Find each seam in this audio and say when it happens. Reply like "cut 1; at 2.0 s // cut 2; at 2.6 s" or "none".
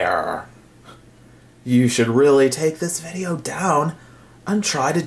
none